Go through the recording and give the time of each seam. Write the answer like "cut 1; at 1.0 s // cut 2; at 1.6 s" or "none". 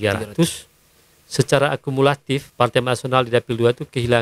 cut 1; at 2.5 s